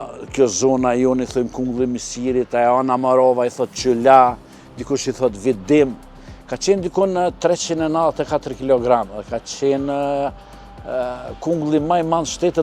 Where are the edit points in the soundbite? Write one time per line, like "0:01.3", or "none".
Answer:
none